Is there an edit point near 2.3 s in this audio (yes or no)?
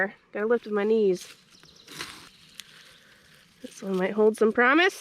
yes